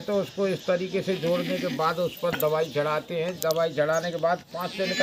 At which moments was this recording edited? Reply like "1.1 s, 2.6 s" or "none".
none